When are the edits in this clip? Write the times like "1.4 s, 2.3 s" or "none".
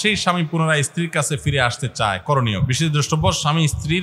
2.7 s